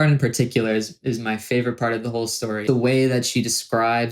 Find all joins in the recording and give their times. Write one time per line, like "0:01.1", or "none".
0:02.6